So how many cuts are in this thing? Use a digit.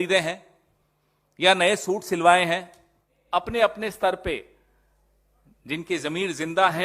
1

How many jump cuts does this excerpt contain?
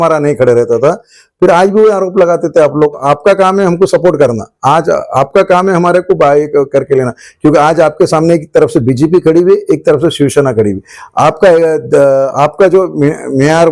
1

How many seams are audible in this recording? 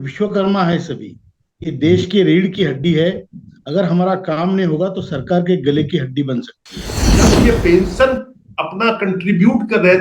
1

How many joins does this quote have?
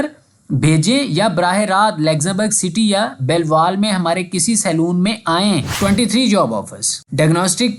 1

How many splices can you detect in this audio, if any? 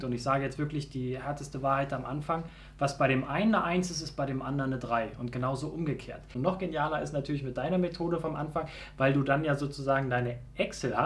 1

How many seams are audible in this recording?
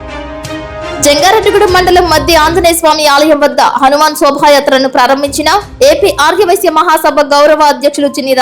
1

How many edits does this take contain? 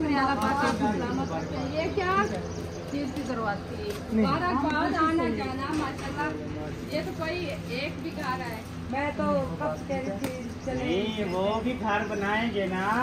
0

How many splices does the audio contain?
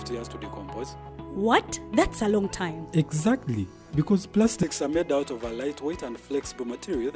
0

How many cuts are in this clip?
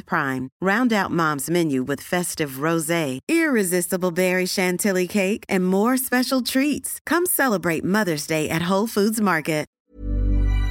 1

